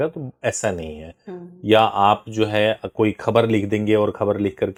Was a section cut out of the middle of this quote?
no; 0 cuts

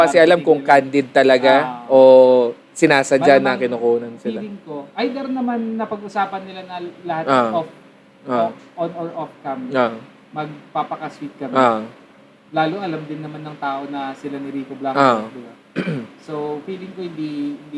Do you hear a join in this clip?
no; 0 cuts

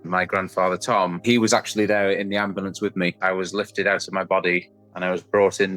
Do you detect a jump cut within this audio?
yes; 2 cuts; at 1.2 s, 3.2 s

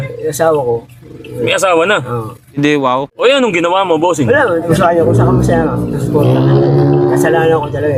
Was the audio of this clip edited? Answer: no; 0 cuts

